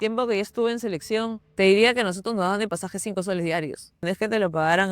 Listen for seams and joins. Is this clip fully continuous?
no; 2 cuts; at 1.4 s, 4.0 s

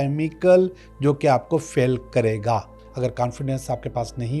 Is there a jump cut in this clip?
yes; 1 cut; at 2.8 s

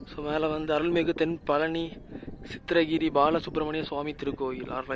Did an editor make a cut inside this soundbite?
no; 0 cuts

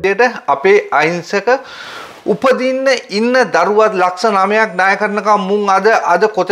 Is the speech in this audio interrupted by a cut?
no; 0 cuts

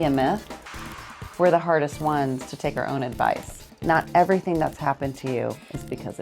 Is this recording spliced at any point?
yes; 2 cuts; at 1.0 s, 3.6 s

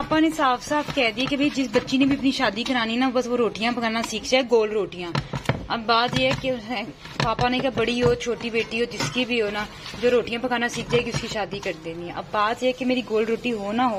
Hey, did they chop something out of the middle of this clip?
no; 0 cuts

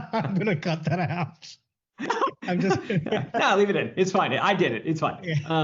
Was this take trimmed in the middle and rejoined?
no; 0 cuts

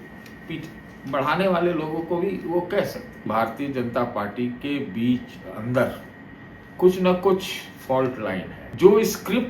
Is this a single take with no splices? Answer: no; 2 cuts; at 3.3 s, 8.6 s

